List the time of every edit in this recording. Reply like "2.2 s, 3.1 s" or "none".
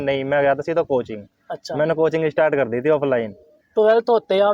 none